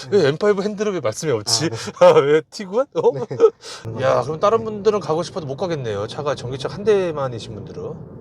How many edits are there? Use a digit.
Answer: 1